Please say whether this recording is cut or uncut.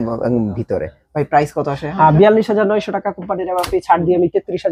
uncut